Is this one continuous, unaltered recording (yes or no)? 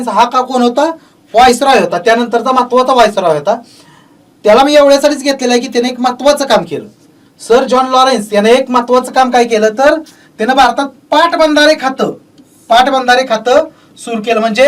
yes